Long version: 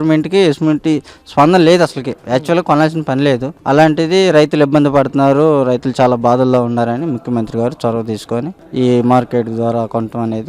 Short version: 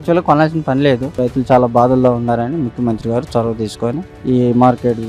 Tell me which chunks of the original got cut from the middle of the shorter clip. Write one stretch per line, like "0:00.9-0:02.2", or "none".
0:03.6-0:05.7